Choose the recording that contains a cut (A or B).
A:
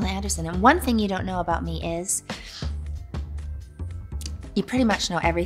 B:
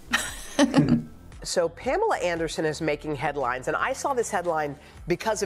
B